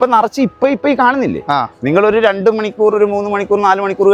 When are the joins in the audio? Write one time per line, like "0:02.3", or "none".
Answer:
none